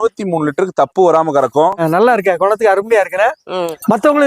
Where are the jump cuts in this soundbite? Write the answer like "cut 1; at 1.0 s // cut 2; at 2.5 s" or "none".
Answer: cut 1; at 1.8 s